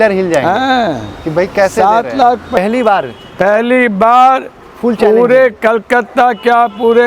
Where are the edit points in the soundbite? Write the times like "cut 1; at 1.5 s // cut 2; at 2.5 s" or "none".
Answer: cut 1; at 2.6 s